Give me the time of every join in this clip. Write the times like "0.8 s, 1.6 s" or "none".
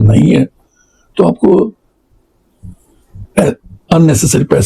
none